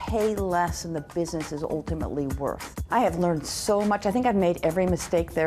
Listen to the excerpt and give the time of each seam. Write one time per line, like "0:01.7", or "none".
0:02.7

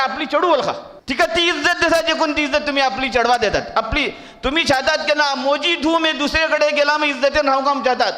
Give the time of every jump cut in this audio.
0:00.9

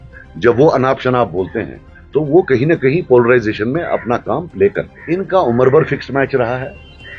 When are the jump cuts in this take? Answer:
0:04.9

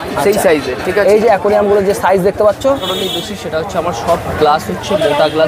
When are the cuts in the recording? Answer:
0:02.9

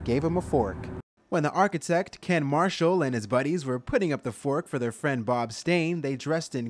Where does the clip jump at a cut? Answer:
none

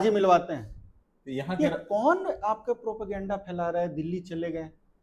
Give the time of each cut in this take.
none

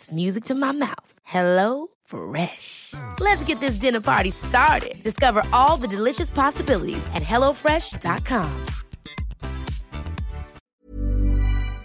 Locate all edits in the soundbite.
0:10.6

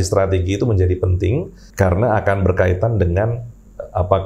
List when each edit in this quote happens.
0:01.6

